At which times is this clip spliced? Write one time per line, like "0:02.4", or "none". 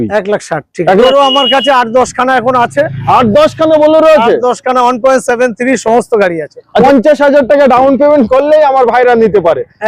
0:01.0
0:06.8